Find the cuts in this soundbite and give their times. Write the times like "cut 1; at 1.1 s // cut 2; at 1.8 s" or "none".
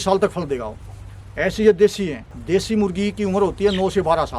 cut 1; at 2.3 s